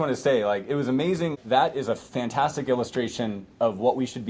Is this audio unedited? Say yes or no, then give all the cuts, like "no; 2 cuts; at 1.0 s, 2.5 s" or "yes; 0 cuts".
no; 1 cut; at 1.4 s